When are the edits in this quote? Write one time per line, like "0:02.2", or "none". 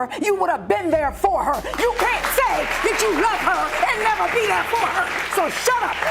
none